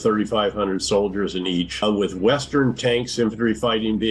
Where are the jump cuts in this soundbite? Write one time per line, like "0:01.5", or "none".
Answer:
0:01.8